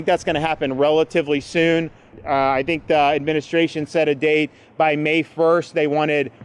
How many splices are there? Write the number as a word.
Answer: one